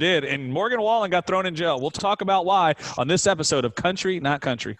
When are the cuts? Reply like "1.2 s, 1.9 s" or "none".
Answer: 1.9 s